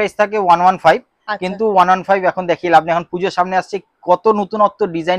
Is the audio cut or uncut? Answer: uncut